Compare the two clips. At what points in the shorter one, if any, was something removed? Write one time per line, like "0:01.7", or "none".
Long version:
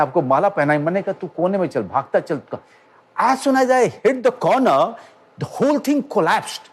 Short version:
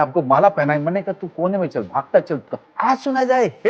0:02.6